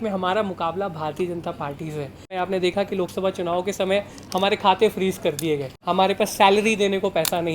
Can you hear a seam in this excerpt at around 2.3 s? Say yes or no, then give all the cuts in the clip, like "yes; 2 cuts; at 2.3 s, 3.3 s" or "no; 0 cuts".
yes; 2 cuts; at 2.3 s, 5.7 s